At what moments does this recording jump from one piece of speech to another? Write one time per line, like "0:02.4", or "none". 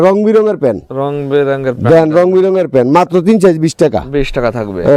none

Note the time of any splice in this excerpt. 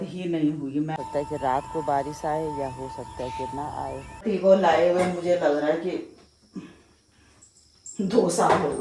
0:01.0
0:04.2

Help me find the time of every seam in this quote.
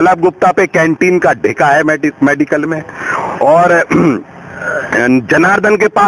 none

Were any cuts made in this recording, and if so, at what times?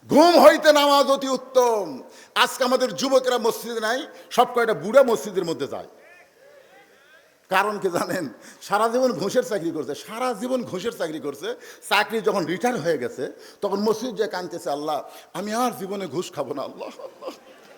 none

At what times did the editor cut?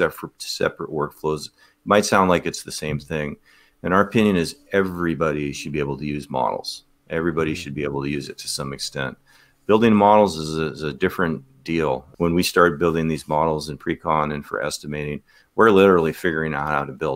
0:12.1

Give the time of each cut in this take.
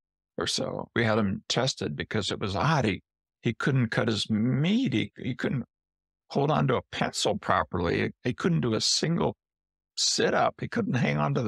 none

